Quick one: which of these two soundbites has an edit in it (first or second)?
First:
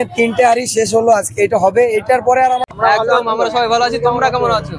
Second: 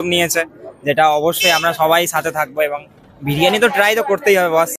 first